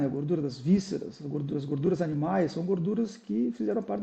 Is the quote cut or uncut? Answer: uncut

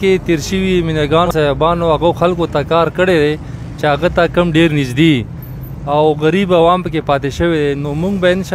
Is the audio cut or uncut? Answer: cut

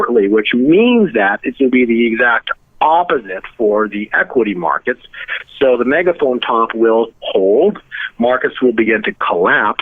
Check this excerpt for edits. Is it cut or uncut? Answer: uncut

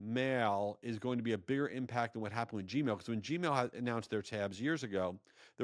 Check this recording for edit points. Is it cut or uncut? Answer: uncut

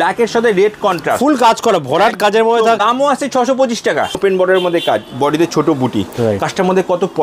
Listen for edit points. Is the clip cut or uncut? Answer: cut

